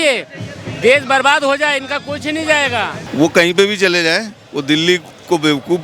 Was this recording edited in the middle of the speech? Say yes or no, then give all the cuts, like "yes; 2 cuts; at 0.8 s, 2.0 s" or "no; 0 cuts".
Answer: yes; 1 cut; at 3.0 s